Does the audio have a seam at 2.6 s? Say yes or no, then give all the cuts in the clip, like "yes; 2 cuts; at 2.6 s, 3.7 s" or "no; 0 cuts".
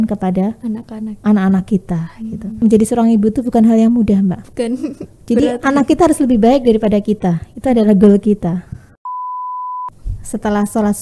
yes; 2 cuts; at 2.6 s, 9.3 s